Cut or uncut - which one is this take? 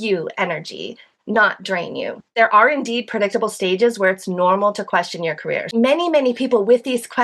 cut